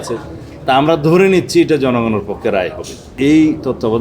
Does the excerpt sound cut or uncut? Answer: cut